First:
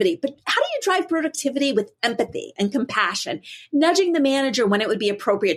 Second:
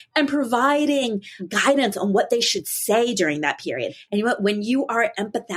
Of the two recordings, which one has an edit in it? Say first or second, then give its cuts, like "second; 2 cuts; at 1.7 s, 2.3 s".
second; 2 cuts; at 1.4 s, 3.9 s